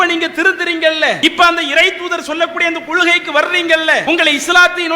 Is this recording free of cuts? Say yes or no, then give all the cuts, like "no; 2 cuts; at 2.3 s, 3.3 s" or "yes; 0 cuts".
no; 2 cuts; at 1.2 s, 4.0 s